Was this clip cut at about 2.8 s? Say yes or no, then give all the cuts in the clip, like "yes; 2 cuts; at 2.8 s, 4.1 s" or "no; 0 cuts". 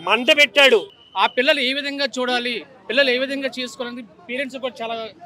no; 1 cut; at 1.0 s